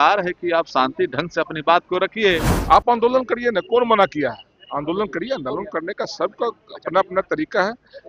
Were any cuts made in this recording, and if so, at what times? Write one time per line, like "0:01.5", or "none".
0:02.5